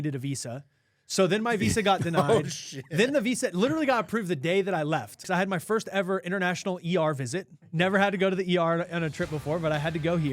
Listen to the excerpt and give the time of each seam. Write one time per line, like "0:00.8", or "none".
0:05.2